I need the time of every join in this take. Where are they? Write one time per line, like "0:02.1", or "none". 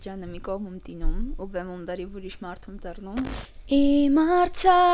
0:03.3